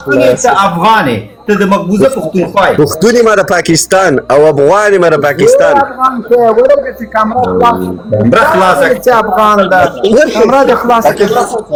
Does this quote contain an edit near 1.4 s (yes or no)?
no